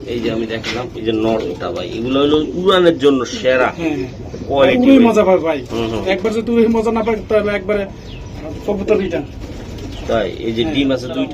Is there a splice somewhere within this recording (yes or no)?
no